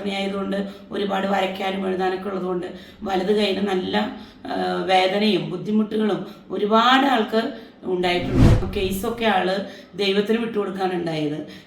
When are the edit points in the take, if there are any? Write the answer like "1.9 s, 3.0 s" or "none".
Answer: 8.7 s